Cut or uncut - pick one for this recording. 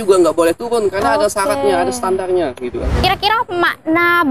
cut